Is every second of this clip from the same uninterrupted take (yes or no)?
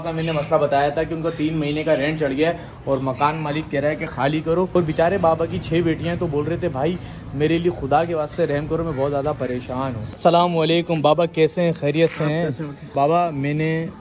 no